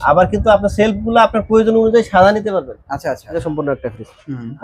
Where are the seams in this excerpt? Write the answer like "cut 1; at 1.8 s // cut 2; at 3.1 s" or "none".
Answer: cut 1; at 3.5 s